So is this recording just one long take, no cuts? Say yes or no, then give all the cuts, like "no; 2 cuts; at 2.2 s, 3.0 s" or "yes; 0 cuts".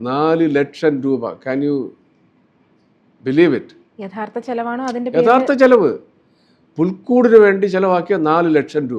yes; 0 cuts